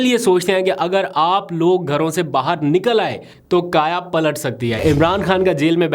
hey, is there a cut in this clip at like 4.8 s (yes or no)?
yes